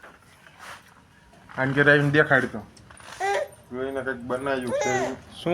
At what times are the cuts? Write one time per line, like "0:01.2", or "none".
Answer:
none